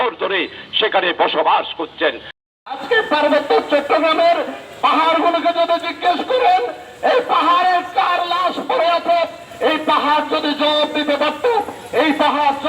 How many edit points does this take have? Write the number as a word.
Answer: one